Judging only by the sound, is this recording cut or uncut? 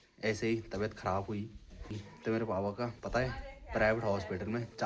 cut